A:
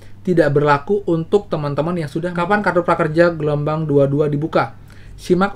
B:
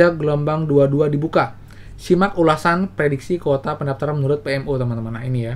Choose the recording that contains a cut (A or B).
A